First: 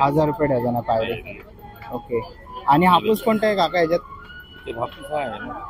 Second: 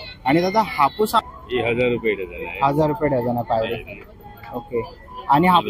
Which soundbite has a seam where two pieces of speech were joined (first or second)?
second